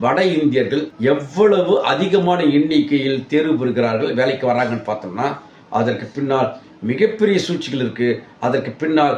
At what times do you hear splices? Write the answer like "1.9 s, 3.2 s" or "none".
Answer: none